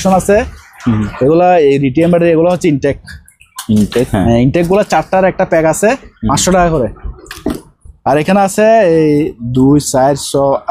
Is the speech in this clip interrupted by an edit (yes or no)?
no